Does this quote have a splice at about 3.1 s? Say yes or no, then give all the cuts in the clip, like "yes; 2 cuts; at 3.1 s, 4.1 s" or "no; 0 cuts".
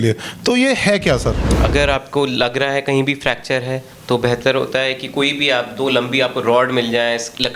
no; 1 cut; at 1.5 s